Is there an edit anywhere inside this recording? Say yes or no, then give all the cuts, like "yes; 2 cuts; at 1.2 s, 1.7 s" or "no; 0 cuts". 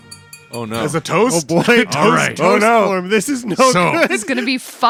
no; 0 cuts